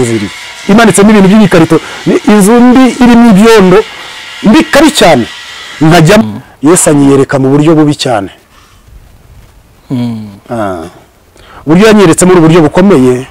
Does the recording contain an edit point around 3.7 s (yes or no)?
no